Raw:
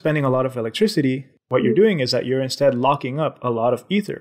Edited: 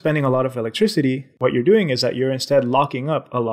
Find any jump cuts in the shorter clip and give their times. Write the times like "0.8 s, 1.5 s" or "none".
1.3 s